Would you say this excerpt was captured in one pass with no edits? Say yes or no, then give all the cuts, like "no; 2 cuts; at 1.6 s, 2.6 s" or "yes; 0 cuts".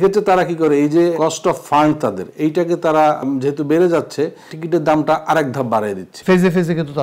no; 4 cuts; at 1.1 s, 3.2 s, 4.5 s, 6.1 s